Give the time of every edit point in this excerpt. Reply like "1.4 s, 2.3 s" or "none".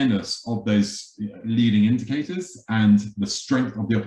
none